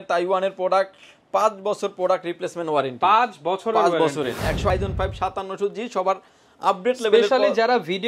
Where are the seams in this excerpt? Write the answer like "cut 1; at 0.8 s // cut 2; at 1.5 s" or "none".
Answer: cut 1; at 4.7 s